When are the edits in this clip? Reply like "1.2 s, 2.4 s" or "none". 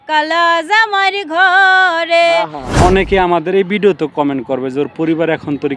2.8 s